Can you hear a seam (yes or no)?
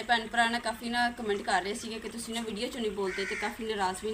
no